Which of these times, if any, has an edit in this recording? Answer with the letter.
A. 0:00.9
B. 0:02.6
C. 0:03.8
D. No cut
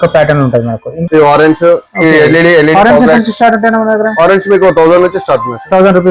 A